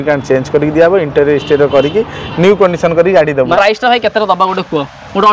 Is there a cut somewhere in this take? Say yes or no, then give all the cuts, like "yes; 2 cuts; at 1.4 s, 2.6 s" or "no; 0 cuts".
yes; 1 cut; at 3.5 s